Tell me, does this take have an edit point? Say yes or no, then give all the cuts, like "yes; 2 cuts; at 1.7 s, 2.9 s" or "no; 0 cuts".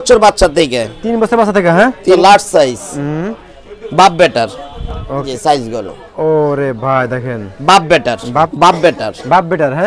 yes; 3 cuts; at 2.2 s, 5.3 s, 8.5 s